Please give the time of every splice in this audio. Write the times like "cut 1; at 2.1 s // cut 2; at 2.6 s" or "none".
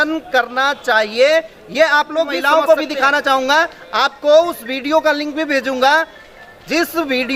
cut 1; at 2.4 s